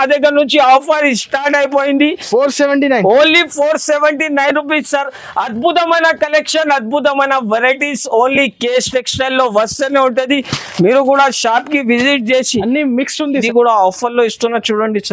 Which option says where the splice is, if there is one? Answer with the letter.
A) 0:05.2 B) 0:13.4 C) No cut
B